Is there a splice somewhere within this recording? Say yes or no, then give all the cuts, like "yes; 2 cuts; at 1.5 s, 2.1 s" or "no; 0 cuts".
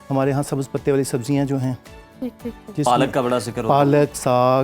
no; 0 cuts